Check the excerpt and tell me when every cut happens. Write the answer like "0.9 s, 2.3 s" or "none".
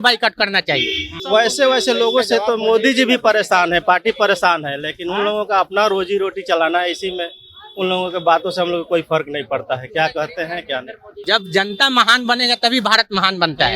1.1 s, 11.2 s